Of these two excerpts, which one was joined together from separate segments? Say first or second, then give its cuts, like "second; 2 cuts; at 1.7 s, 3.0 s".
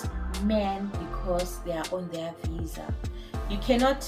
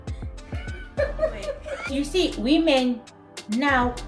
second; 1 cut; at 1.7 s